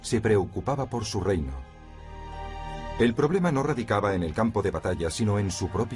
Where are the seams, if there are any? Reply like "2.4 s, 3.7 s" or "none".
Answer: 4.4 s